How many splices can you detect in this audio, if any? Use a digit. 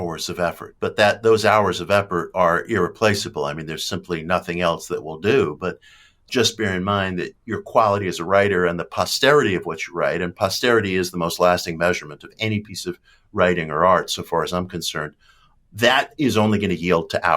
2